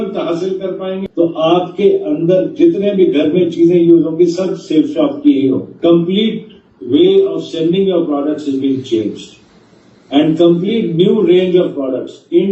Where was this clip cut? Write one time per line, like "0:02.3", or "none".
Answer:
0:01.0
0:05.7